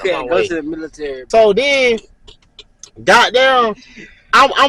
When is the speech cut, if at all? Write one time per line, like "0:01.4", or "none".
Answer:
0:01.1